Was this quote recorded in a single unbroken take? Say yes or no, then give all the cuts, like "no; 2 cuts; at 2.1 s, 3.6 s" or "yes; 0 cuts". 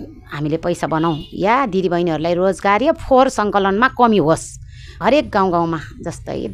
no; 1 cut; at 4.9 s